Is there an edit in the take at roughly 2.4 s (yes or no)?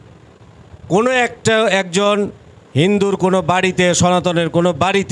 no